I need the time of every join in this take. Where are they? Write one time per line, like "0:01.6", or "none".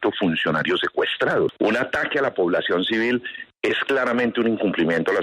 0:01.5